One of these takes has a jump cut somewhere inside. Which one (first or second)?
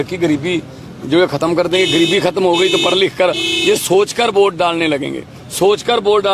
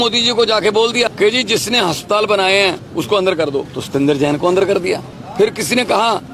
second